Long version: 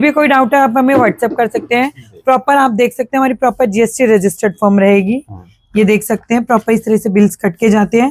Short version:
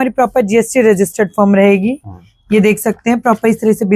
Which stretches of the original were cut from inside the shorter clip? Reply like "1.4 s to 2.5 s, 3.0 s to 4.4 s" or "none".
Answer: none